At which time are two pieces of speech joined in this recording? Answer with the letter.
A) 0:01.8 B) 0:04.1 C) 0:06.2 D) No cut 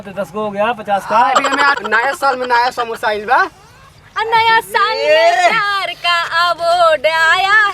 A